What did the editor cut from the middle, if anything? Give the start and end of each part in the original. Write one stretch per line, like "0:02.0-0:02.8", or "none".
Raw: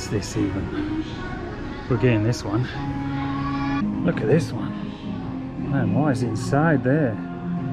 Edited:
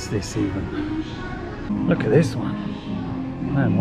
0:01.7-0:03.9